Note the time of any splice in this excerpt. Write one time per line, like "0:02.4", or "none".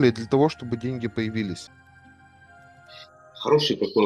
0:01.7